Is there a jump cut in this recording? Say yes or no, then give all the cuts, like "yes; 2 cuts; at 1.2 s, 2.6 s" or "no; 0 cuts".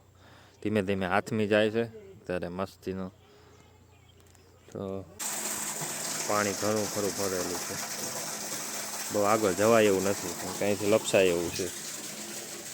yes; 1 cut; at 5.2 s